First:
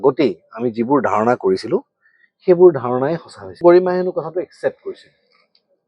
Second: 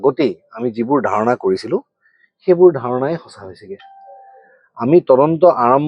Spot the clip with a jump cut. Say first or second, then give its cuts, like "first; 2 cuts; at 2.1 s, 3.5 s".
first; 1 cut; at 3.6 s